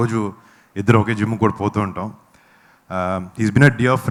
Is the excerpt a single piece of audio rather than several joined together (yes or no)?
yes